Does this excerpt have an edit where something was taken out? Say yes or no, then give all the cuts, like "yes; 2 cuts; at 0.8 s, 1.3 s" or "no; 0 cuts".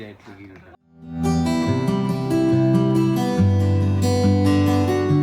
yes; 1 cut; at 1.2 s